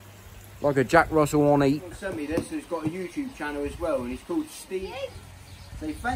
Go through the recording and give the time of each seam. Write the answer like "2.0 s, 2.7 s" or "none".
2.0 s, 4.9 s